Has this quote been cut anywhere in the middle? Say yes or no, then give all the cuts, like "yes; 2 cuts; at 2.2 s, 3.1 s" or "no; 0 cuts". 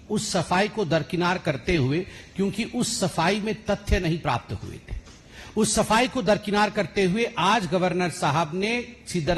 no; 0 cuts